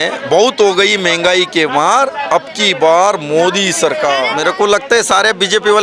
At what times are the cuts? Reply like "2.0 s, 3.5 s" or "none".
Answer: 4.3 s